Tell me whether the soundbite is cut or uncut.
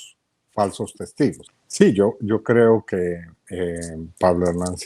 cut